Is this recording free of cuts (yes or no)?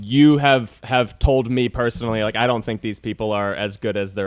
yes